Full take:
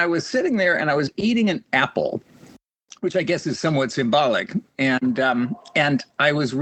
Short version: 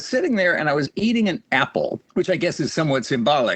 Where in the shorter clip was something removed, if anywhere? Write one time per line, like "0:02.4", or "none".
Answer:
0:02.0